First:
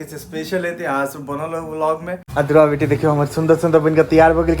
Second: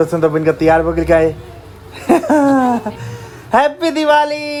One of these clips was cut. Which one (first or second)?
first